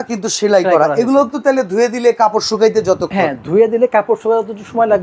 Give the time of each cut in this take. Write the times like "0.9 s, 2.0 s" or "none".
none